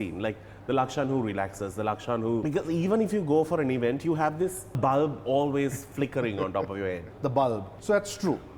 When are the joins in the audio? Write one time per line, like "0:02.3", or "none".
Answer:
0:02.4
0:04.8
0:07.1
0:07.7

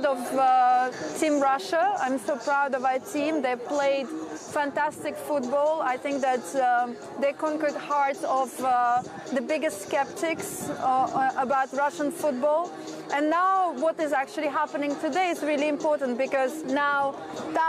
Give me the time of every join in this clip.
none

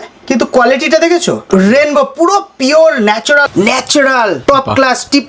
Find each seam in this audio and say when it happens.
0:01.4
0:03.4
0:04.4

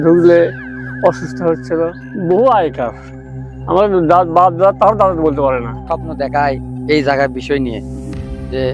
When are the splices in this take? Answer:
0:02.0
0:05.8

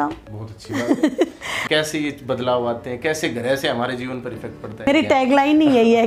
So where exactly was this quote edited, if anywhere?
0:01.5
0:04.9

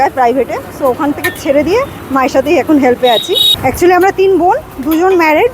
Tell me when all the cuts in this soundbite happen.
0:02.0
0:03.5

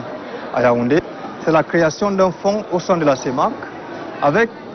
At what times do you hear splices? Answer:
0:01.0

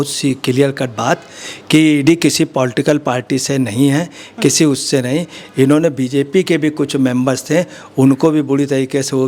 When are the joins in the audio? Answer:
none

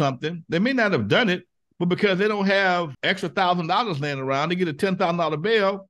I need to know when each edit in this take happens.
0:02.9

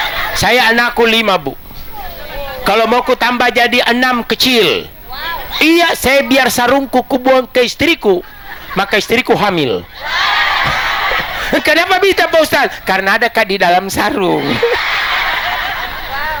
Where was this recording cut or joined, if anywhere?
none

